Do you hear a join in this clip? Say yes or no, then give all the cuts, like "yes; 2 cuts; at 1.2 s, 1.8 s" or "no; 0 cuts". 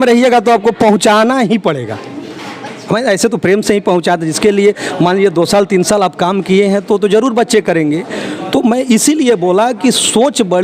no; 0 cuts